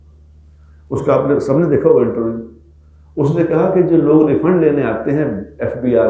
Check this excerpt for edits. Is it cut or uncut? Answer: uncut